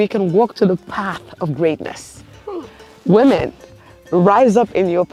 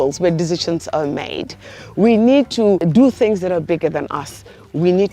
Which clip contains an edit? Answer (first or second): second